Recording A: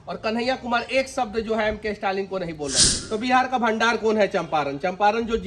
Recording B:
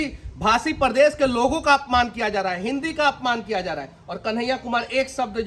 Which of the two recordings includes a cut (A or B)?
A